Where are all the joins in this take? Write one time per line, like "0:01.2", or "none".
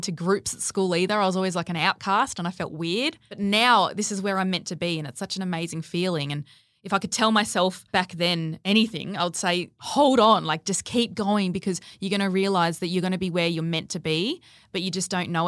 0:03.4
0:08.0
0:09.8